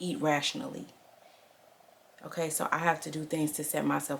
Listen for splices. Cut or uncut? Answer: uncut